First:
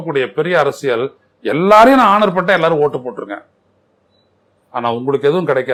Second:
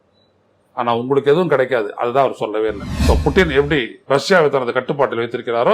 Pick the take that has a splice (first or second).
second